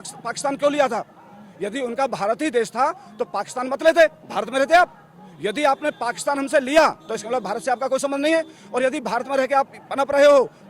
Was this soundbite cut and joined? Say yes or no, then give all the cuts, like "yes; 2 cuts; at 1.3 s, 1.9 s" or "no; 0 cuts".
no; 0 cuts